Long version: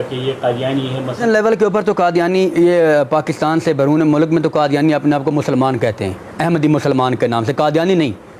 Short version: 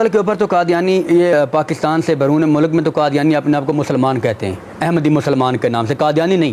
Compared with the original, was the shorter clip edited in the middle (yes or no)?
yes